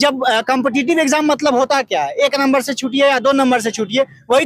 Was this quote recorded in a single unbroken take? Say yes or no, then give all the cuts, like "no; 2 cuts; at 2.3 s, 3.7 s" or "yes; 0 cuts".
yes; 0 cuts